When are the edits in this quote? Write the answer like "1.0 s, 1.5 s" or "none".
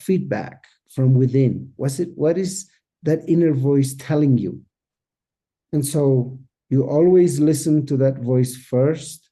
none